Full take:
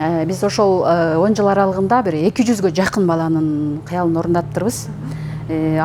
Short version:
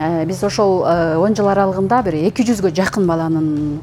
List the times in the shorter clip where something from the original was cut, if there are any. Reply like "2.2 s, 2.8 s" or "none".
none